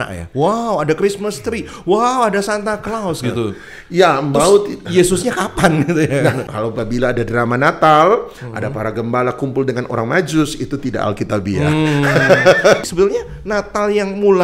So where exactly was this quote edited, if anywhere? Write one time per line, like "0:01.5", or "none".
0:06.4
0:12.8